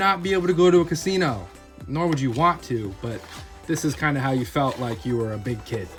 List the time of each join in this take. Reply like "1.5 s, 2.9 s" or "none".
none